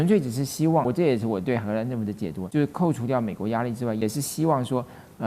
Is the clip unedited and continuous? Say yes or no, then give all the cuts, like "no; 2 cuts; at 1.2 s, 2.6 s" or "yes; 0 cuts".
no; 3 cuts; at 0.9 s, 2.4 s, 4.0 s